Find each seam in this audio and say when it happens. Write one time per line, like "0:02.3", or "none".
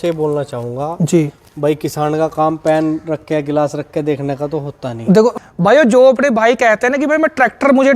0:05.4